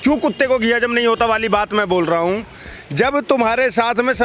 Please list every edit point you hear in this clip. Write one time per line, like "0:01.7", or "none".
none